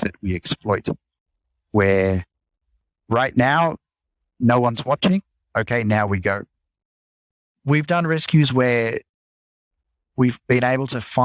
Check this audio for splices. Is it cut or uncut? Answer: uncut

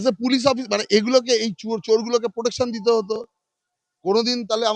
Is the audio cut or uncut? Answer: uncut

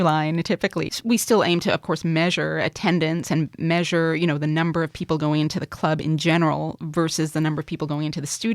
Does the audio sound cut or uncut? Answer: cut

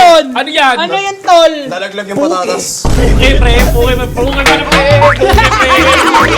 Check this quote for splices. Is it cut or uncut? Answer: uncut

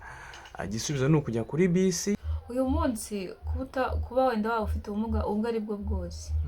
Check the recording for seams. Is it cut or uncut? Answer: cut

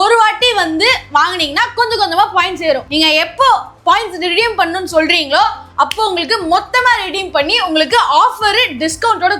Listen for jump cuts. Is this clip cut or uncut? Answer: uncut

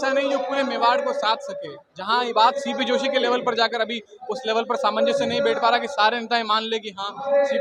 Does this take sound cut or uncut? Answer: uncut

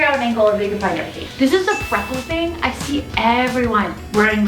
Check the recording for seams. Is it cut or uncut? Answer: cut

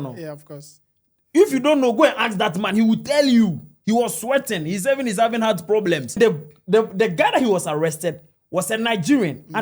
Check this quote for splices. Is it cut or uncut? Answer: cut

